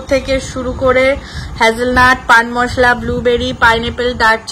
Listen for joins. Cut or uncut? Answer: uncut